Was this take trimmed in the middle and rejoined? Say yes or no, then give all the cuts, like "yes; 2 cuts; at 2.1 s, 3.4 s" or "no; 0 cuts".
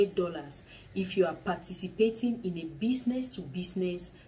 no; 0 cuts